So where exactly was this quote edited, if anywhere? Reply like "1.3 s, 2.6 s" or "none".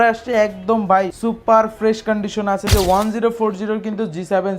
1.1 s, 2.7 s